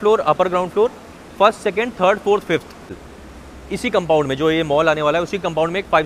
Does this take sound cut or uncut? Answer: cut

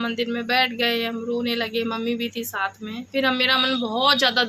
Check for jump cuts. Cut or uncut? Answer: cut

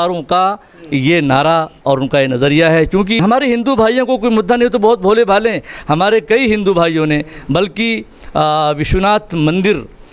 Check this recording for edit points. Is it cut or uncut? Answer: cut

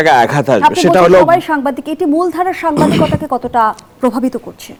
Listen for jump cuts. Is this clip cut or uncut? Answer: uncut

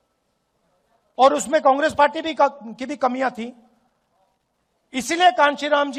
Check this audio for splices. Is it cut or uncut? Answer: uncut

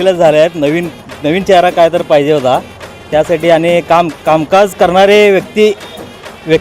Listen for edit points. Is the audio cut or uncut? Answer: cut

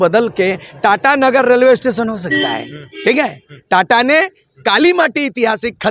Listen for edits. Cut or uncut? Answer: uncut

